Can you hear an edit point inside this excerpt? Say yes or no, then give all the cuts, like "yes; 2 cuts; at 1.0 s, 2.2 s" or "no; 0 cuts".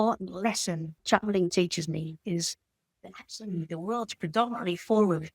yes; 1 cut; at 0.9 s